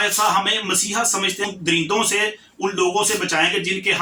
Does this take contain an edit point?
yes; 1 cut; at 1.5 s

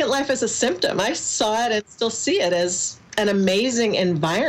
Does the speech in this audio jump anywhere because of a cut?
no; 0 cuts

